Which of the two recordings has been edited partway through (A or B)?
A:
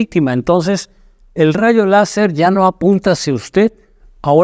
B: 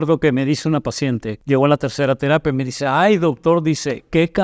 B